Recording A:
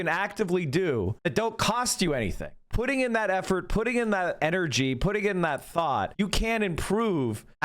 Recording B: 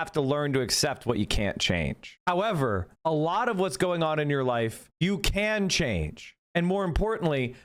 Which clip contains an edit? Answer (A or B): A